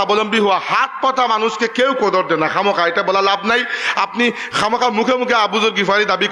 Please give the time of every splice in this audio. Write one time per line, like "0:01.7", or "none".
none